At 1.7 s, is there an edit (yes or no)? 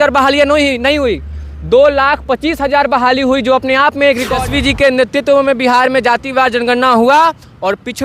no